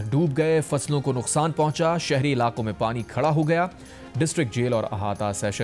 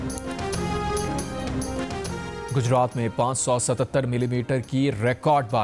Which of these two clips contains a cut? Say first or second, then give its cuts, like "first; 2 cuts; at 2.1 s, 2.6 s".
second; 1 cut; at 1.0 s